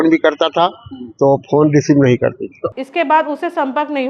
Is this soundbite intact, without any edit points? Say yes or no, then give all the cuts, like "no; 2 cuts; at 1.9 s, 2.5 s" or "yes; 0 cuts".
no; 1 cut; at 2.6 s